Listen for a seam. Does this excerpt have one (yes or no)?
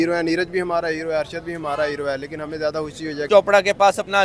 yes